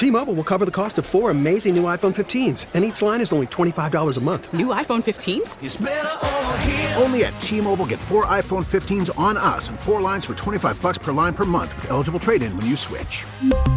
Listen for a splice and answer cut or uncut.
uncut